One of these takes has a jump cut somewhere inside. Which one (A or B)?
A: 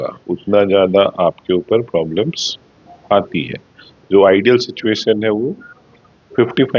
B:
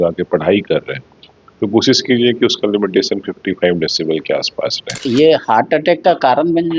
B